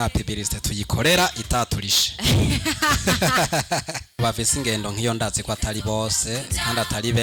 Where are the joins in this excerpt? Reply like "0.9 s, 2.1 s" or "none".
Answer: 4.1 s